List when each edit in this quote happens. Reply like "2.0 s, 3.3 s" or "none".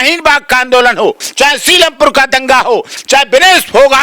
1.2 s, 3.0 s